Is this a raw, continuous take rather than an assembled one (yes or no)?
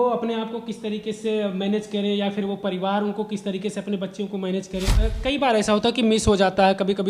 no